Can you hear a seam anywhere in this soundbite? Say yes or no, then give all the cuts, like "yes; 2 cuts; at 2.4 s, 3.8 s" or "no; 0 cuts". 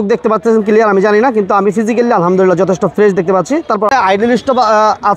yes; 1 cut; at 3.9 s